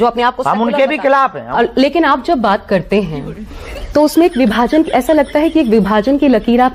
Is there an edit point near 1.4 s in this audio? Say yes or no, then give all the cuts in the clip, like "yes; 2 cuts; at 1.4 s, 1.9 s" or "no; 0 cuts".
yes; 1 cut; at 1.4 s